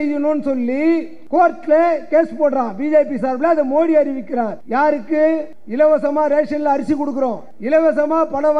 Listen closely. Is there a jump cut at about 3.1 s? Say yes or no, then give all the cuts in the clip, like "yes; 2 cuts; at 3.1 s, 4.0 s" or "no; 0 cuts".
no; 4 cuts; at 1.2 s, 4.6 s, 5.6 s, 7.5 s